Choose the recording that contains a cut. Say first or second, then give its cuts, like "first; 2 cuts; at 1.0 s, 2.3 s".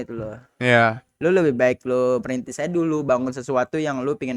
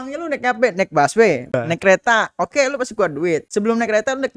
second; 2 cuts; at 1.5 s, 3.5 s